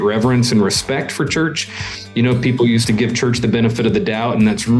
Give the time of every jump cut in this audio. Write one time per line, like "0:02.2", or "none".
none